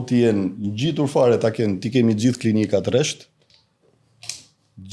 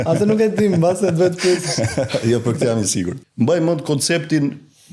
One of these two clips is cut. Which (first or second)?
second